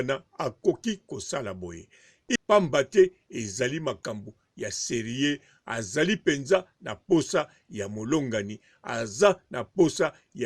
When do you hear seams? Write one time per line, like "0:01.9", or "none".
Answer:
0:02.4